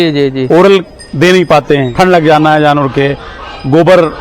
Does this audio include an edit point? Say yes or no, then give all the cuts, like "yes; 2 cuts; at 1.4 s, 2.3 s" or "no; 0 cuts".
yes; 1 cut; at 1.9 s